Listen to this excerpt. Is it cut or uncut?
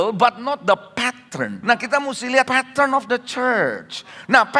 cut